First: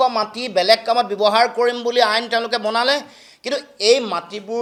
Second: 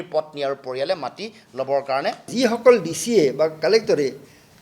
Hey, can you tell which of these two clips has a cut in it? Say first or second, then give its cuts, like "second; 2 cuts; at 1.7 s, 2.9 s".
second; 1 cut; at 2.3 s